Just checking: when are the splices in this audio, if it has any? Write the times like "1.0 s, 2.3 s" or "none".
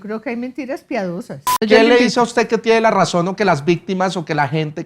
1.6 s